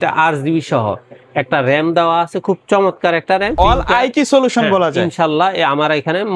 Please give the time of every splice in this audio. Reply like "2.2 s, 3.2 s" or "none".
3.5 s